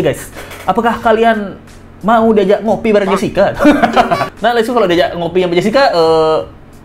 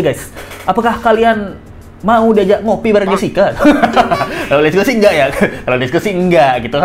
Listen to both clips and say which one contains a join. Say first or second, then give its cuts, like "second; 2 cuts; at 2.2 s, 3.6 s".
first; 1 cut; at 4.3 s